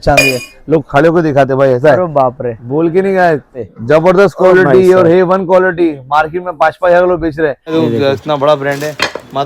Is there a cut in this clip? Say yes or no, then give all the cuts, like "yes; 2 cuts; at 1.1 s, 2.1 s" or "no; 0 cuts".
yes; 2 cuts; at 3.6 s, 7.6 s